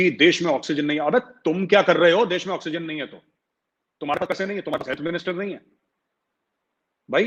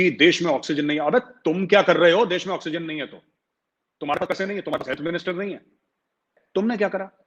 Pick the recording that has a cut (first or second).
second